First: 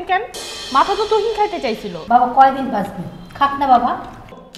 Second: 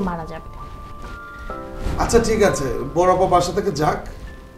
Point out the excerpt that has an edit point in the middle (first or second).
first